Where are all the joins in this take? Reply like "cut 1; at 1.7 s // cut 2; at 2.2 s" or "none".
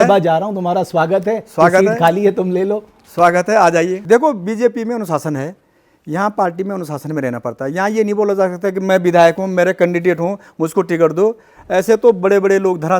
cut 1; at 4.0 s